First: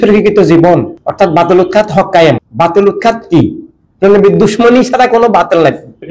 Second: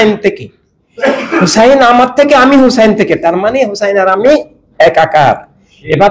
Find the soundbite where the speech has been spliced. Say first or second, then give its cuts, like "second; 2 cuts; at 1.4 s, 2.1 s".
first; 2 cuts; at 1.0 s, 2.5 s